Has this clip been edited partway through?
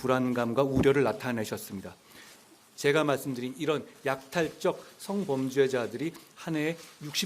yes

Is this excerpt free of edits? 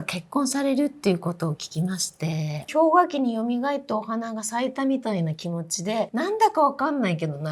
no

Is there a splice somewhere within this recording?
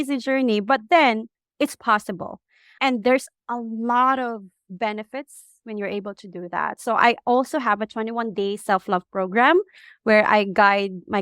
yes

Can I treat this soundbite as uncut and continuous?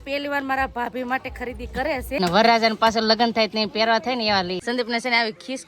no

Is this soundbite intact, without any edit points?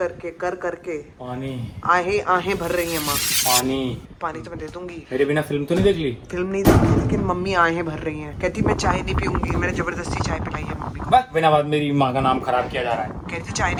yes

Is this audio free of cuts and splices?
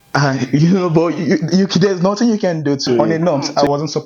no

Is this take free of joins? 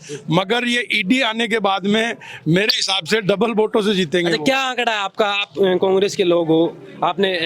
yes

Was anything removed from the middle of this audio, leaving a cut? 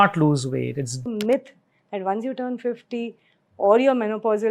yes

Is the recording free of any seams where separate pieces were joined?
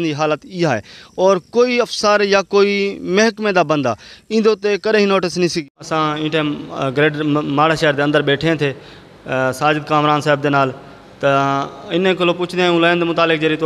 no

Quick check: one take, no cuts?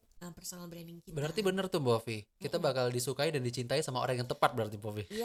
yes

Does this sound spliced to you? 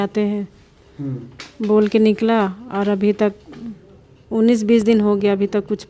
no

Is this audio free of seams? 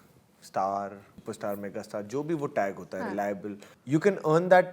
no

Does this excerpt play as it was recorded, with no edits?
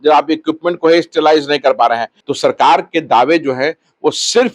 no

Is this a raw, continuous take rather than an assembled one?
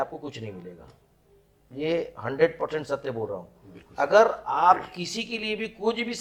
yes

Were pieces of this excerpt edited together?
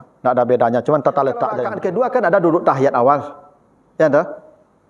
yes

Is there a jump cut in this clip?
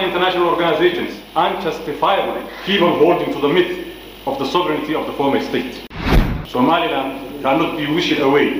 yes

